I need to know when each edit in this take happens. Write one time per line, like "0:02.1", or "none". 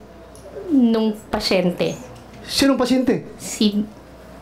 none